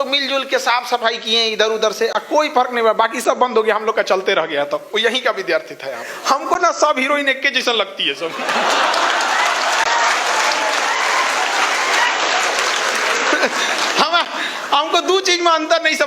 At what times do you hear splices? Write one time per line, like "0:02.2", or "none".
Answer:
0:06.1

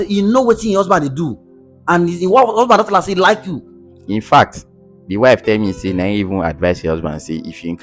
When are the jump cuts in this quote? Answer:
none

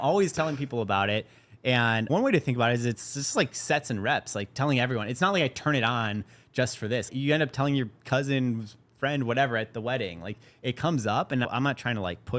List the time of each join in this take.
0:02.1
0:07.1
0:11.5

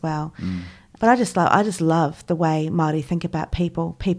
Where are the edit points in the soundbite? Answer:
0:00.9

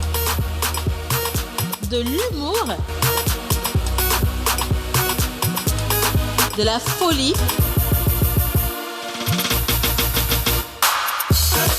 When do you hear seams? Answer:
0:10.7

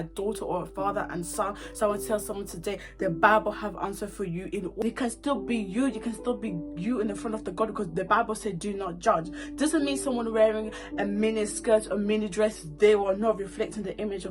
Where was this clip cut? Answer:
0:04.8

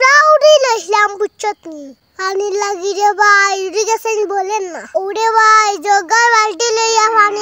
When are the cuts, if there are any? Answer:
none

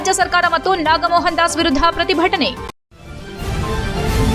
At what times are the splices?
0:02.6

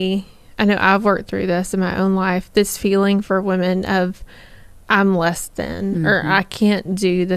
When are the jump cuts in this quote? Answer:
none

